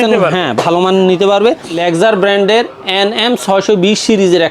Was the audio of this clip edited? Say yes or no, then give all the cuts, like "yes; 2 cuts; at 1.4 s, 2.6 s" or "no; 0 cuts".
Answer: yes; 1 cut; at 1.8 s